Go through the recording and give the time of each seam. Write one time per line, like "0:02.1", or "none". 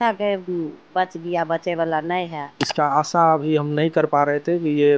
0:02.6

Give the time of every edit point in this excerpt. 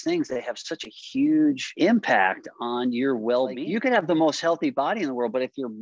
0:01.7
0:03.6

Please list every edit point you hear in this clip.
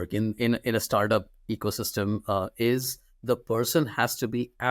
none

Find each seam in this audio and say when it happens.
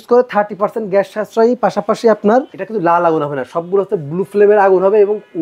0:02.6

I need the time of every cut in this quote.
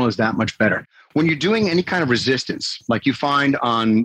none

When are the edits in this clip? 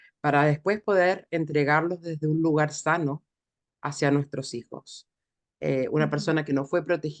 none

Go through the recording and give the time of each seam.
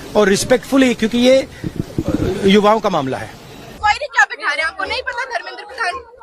0:03.8

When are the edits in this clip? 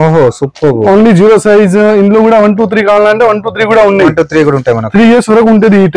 none

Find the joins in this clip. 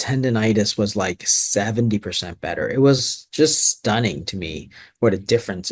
none

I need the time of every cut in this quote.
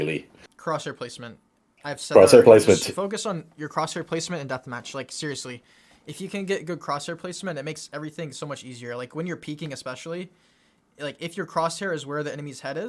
none

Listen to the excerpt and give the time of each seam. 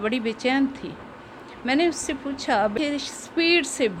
0:02.7

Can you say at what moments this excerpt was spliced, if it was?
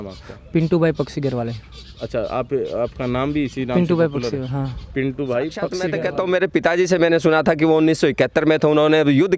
0:05.9

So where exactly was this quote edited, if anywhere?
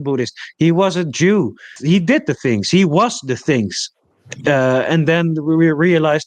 0:01.8

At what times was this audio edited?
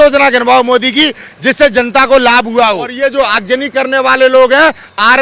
0:02.9

